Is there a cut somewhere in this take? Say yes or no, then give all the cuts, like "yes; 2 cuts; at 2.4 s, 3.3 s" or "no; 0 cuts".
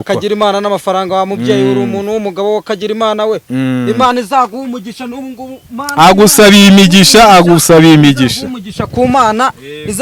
no; 0 cuts